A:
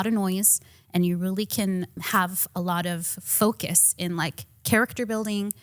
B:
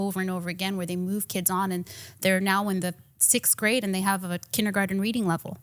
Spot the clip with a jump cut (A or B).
A